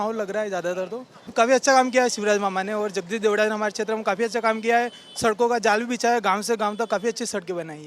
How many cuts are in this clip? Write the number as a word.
one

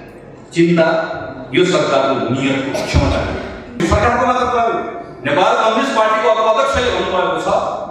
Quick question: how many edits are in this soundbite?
one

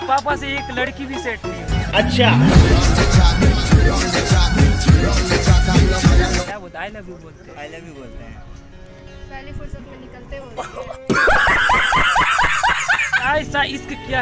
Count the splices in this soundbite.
two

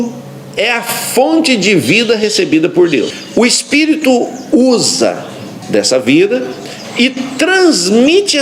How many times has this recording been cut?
one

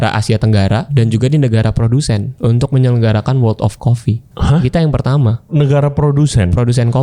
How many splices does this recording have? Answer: four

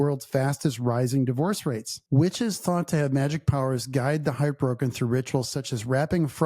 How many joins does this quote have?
one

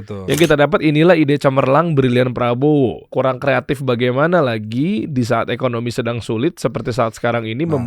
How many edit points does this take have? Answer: one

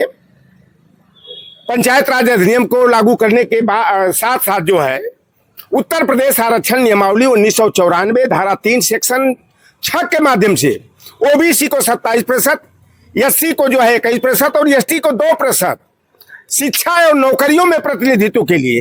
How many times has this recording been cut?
zero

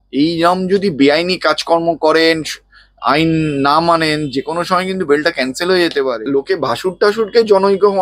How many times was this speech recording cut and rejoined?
one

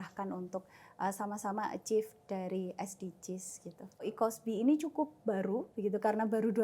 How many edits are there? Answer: one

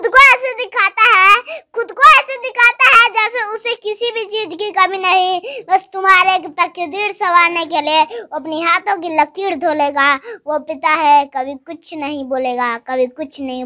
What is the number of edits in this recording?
zero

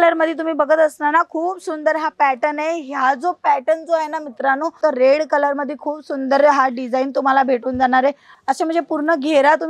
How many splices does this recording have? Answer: two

